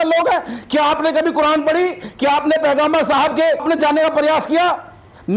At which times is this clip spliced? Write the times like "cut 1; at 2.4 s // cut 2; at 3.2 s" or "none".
none